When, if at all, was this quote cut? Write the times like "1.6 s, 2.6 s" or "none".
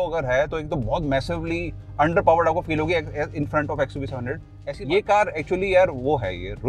4.6 s